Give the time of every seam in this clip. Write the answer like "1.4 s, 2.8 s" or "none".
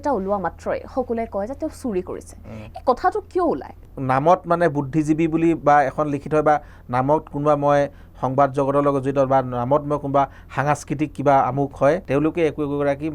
3.9 s, 12.0 s